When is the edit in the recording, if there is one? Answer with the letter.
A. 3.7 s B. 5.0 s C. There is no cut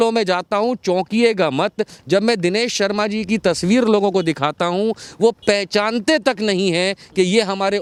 C